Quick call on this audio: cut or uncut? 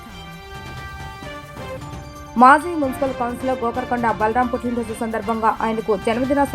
cut